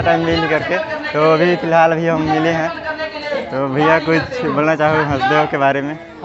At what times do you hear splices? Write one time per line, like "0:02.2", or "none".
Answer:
none